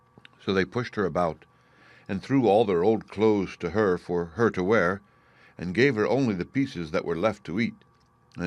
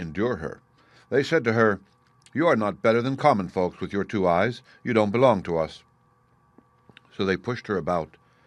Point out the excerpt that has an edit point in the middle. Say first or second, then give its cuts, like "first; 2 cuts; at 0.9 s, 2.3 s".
first; 1 cut; at 4.3 s